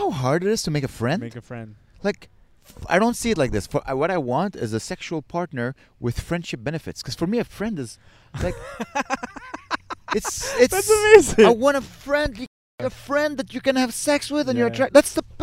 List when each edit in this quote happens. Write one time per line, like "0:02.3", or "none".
none